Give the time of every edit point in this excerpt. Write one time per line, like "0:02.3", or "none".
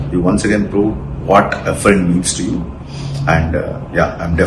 none